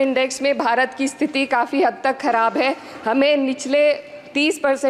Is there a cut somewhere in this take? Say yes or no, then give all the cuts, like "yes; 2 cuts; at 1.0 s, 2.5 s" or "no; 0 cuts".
no; 0 cuts